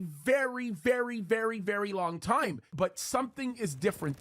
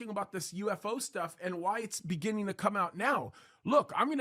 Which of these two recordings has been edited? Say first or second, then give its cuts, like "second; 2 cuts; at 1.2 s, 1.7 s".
first; 1 cut; at 2.6 s